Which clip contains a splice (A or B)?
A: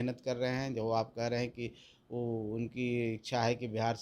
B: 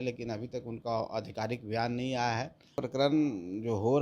B